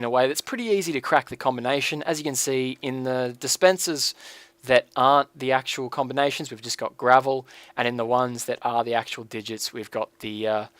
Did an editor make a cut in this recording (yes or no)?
yes